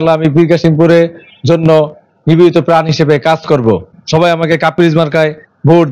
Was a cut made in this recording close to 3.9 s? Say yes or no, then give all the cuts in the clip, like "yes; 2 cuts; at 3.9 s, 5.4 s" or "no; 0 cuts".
yes; 1 cut; at 3.9 s